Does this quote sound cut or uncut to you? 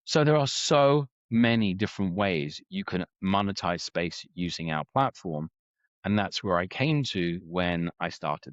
uncut